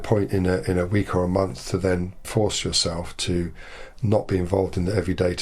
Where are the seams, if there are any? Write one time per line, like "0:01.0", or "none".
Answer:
0:02.2